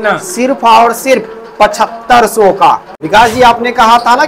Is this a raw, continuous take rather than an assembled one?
no; 1 cut; at 2.8 s

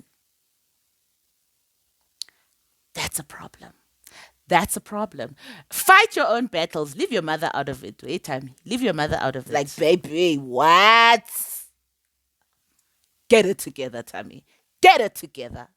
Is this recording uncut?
no; 1 cut; at 9.4 s

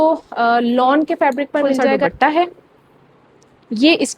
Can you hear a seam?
yes; 1 cut; at 2.0 s

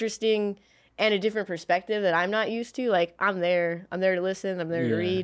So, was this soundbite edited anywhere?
no; 0 cuts

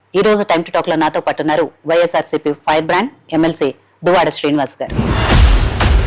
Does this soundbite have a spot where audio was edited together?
yes; 1 cut; at 4.8 s

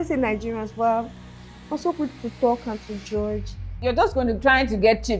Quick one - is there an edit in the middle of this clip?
yes; 1 cut; at 3.8 s

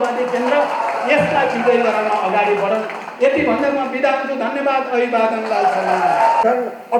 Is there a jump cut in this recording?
no; 0 cuts

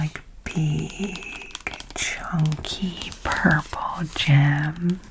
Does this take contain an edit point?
no; 0 cuts

